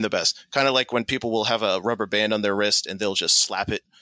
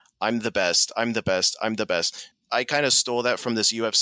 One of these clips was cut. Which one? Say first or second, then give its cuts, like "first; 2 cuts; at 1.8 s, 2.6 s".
second; 1 cut; at 2.3 s